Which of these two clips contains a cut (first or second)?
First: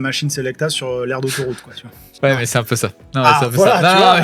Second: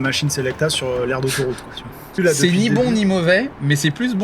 second